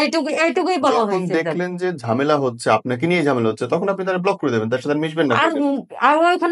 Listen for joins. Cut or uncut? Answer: uncut